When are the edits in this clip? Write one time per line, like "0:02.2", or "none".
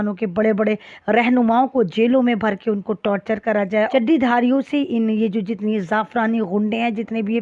0:03.9